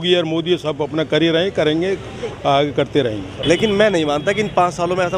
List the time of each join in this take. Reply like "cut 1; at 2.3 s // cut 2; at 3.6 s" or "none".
cut 1; at 3.3 s